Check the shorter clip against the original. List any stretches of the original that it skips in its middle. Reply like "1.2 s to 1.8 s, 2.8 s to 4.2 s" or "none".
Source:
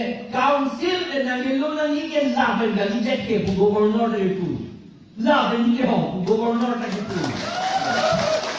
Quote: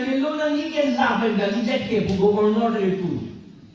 none